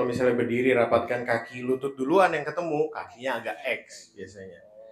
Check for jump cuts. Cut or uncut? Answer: uncut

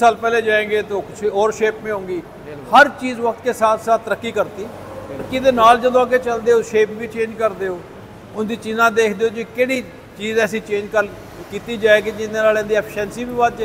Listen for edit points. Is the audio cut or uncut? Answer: cut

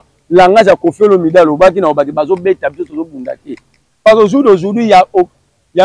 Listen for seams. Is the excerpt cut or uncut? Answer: uncut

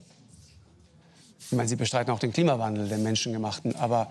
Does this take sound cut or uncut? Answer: uncut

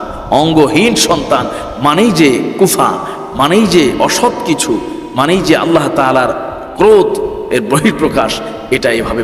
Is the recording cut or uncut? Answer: cut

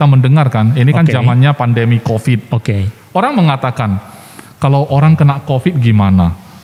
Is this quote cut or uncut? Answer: uncut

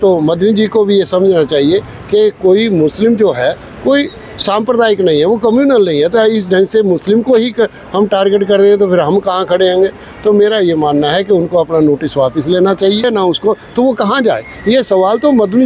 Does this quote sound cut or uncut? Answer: cut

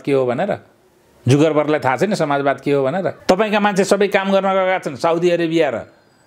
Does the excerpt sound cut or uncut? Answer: cut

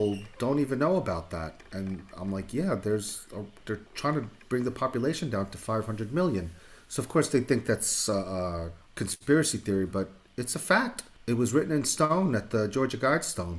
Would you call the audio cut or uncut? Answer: cut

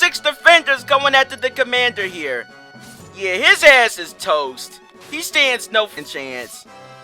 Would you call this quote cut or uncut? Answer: cut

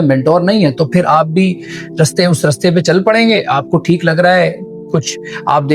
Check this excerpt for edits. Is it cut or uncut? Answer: uncut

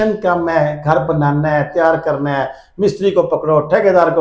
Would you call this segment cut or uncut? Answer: uncut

